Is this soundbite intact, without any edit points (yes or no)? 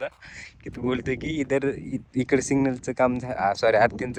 yes